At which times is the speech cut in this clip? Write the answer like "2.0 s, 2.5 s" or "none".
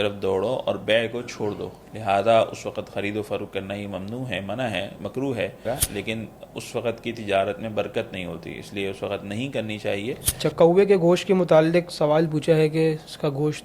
5.7 s, 10.3 s

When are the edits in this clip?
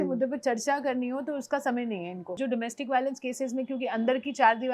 2.4 s

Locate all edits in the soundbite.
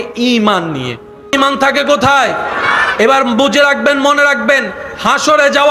1.3 s

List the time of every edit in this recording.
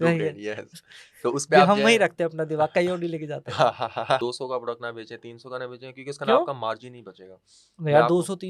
4.2 s

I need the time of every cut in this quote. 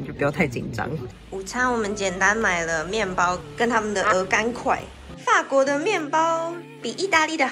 1.2 s

